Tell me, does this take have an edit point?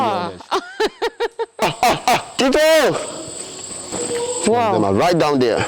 yes; 3 cuts; at 1.6 s, 2.3 s, 3.8 s

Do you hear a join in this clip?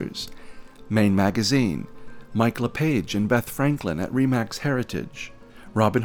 no; 0 cuts

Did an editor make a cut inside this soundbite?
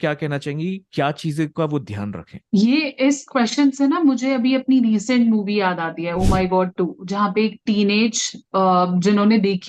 no; 0 cuts

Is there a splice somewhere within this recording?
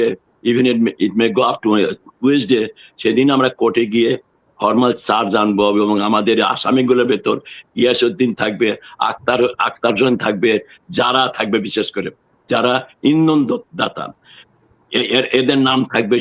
no; 0 cuts

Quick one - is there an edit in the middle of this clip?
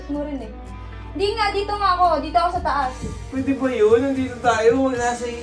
yes; 1 cut; at 3.3 s

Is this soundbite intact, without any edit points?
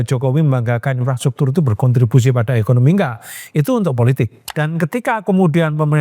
no; 1 cut; at 4.4 s

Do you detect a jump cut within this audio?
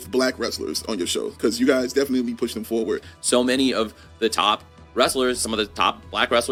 no; 0 cuts

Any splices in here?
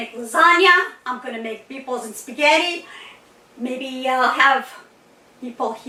no; 0 cuts

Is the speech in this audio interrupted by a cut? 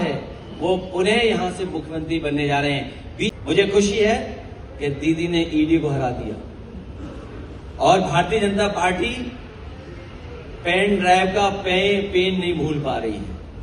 yes; 1 cut; at 3.3 s

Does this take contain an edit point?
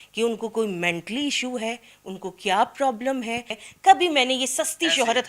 yes; 1 cut; at 3.5 s

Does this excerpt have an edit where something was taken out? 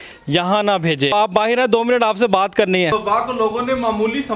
yes; 2 cuts; at 1.1 s, 2.9 s

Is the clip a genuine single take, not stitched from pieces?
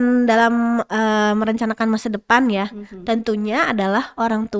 yes; 0 cuts

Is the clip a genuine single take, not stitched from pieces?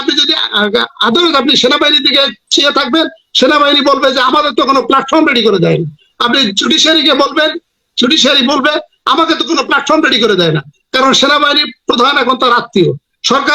no; 1 cut; at 10.8 s

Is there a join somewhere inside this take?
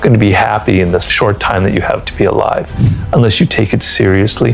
yes; 1 cut; at 1.0 s

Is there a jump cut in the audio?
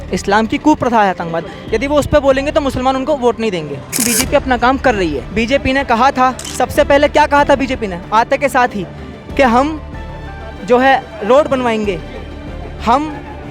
yes; 3 cuts; at 4.0 s, 5.2 s, 6.4 s

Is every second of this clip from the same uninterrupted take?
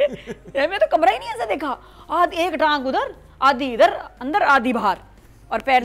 yes; 0 cuts

